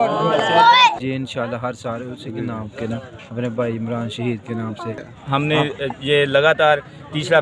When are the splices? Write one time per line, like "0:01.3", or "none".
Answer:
0:00.9
0:05.0